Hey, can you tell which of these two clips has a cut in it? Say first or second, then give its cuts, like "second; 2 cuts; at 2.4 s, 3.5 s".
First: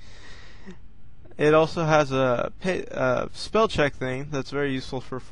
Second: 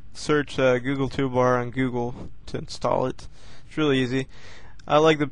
second; 1 cut; at 3.3 s